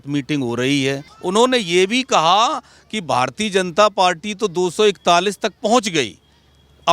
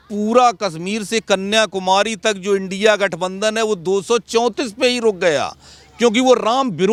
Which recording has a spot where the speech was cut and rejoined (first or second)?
first